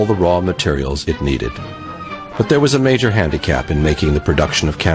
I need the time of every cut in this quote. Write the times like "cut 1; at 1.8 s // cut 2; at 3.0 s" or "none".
cut 1; at 3.0 s